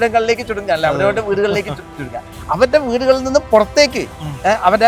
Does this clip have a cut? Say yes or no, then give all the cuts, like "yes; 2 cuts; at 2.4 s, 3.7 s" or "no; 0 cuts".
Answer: no; 0 cuts